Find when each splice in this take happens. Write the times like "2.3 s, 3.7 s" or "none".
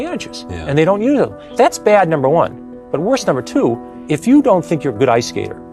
1.4 s, 3.9 s